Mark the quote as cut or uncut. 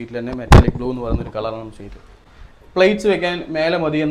cut